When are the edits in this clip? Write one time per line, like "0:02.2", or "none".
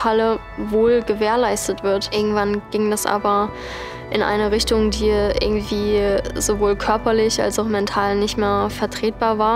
0:02.1